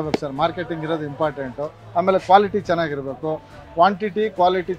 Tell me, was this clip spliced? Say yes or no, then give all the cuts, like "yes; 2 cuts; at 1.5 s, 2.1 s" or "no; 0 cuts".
no; 0 cuts